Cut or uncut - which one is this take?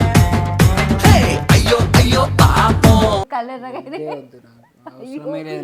uncut